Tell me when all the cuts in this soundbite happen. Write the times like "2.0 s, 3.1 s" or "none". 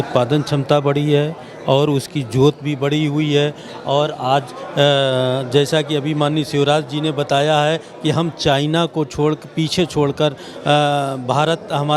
none